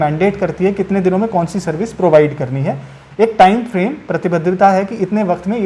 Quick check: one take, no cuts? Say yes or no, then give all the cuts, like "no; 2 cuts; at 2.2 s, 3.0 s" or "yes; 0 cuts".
yes; 0 cuts